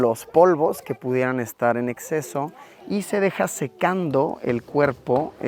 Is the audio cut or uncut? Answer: uncut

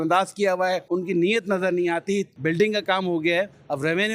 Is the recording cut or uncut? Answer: cut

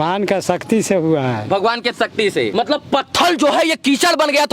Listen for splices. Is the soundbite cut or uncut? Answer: cut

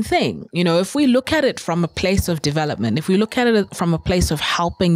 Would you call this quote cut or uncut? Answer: uncut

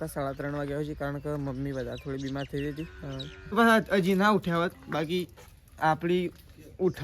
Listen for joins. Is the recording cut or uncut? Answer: cut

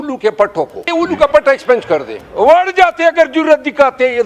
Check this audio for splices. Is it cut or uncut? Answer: cut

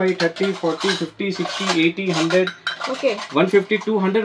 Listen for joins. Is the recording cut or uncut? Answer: uncut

